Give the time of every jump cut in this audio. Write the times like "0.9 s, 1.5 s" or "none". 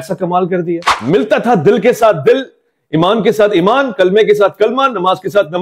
0.9 s